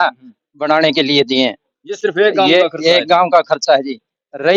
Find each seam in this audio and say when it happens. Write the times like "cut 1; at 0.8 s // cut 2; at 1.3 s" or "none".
none